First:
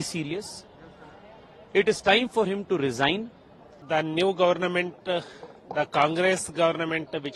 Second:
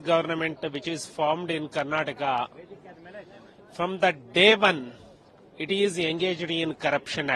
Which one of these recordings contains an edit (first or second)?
first